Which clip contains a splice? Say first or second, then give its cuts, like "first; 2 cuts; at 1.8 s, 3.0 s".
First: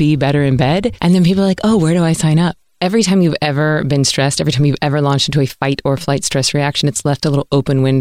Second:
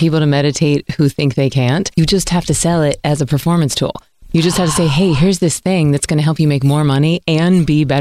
first; 1 cut; at 2.6 s